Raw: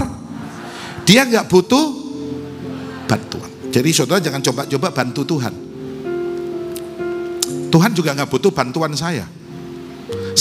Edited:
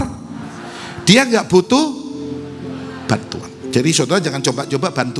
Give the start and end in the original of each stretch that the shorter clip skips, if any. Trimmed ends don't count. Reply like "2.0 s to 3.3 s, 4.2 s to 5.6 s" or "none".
none